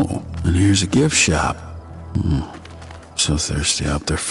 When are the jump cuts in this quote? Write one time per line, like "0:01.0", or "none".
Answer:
none